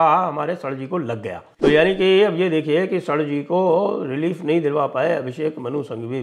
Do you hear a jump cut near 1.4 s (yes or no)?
yes